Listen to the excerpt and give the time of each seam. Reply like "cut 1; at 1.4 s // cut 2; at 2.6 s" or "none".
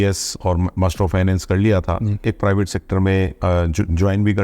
cut 1; at 2.2 s